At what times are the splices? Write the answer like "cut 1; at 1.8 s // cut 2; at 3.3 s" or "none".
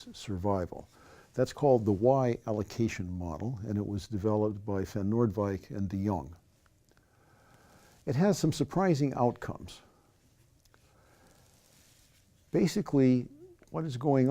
cut 1; at 4.2 s

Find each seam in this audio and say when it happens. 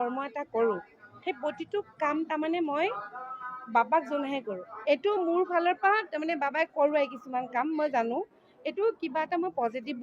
cut 1; at 4.6 s

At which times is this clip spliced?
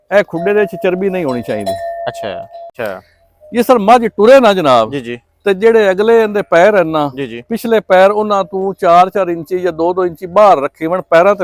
cut 1; at 2.8 s

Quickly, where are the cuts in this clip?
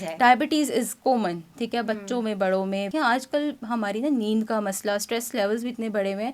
cut 1; at 2.9 s

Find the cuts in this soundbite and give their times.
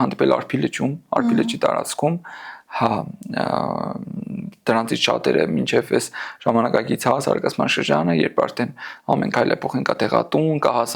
none

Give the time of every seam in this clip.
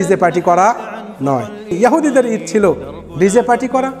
cut 1; at 1.7 s

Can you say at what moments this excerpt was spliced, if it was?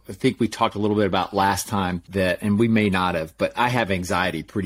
cut 1; at 2.0 s

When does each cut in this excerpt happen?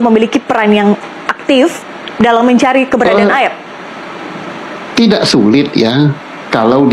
none

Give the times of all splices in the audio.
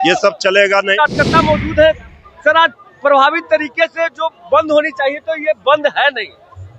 cut 1; at 0.9 s

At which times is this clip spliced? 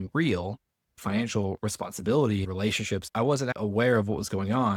none

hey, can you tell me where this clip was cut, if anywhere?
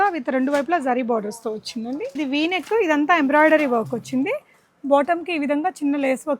cut 1; at 2.2 s

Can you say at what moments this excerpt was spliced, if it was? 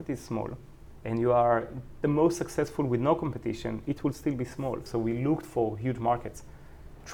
cut 1; at 4.8 s

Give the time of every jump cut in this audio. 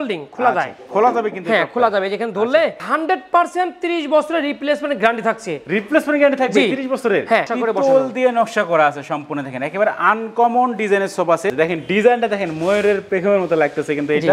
cut 1; at 2.8 s // cut 2; at 7.4 s // cut 3; at 11.5 s

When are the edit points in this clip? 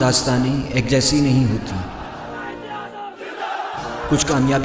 cut 1; at 3.4 s

